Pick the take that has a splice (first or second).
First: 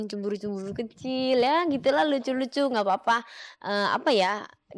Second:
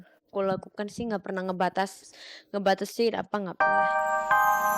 second